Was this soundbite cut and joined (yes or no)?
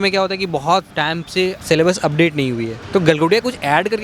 no